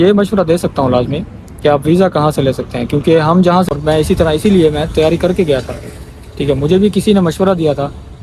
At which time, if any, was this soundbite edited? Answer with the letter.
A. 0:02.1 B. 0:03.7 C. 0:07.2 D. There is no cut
B